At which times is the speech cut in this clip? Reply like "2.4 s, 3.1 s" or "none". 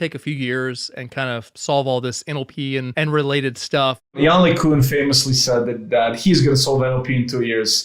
1.5 s, 2.9 s